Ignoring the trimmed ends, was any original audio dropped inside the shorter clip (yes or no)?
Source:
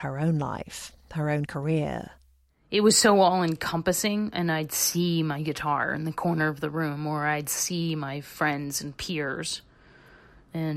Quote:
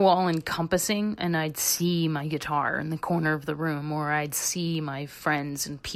no